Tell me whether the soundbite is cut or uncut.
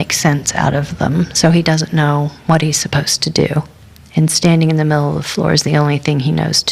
uncut